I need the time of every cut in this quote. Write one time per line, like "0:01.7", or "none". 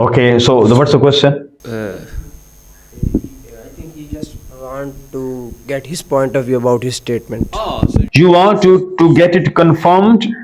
0:01.4